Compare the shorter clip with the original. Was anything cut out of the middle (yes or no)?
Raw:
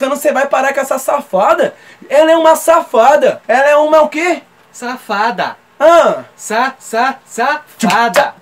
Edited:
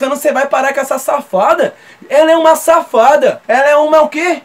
no